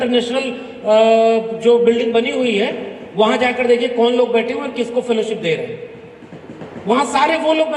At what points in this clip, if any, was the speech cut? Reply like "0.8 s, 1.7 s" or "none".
none